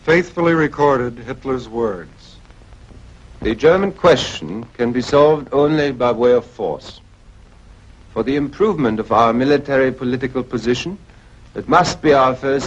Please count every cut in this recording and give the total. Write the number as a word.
one